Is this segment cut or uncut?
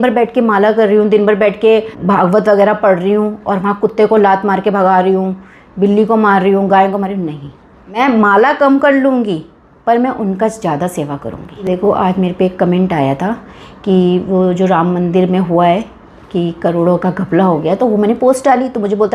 cut